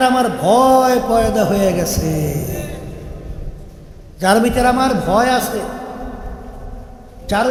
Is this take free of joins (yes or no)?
yes